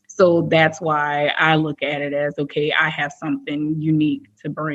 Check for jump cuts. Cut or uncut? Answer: uncut